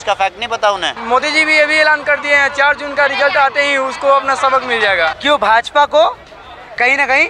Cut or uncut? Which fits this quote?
cut